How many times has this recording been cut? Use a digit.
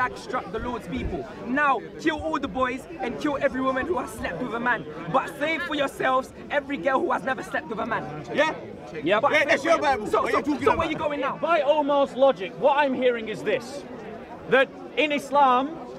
1